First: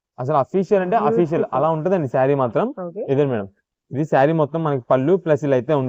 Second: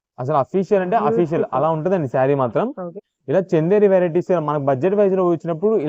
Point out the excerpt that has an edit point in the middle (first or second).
second